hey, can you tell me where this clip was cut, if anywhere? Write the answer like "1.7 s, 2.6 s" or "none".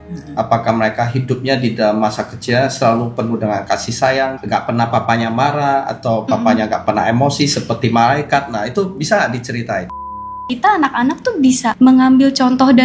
4.4 s, 10.3 s, 11.7 s